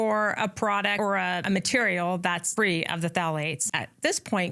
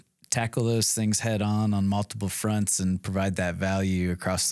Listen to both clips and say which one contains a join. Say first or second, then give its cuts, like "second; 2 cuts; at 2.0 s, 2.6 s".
first; 3 cuts; at 1.1 s, 2.5 s, 3.6 s